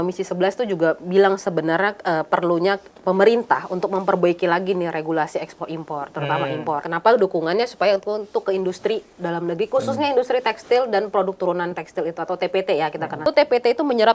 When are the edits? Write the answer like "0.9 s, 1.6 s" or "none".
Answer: 6.8 s, 13.2 s